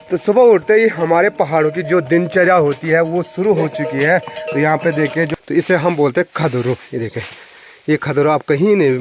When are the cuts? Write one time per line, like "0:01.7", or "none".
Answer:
0:05.3